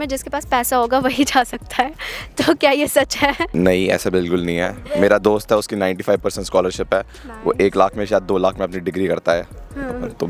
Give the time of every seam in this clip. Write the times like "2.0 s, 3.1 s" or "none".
none